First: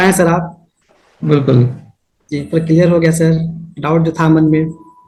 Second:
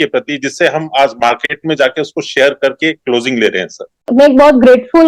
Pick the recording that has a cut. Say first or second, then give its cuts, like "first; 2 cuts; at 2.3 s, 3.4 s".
second; 1 cut; at 4.1 s